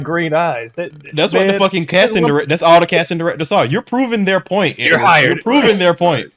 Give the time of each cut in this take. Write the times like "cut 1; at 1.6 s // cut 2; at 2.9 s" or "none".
none